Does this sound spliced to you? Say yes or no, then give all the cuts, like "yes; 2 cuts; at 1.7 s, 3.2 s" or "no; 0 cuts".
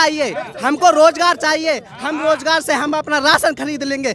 no; 0 cuts